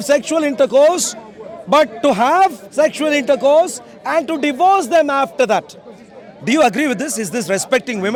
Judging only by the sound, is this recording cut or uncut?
uncut